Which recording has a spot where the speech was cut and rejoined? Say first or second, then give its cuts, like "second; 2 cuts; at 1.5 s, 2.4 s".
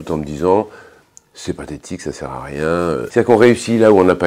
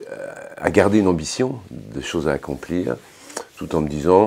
first; 1 cut; at 3.1 s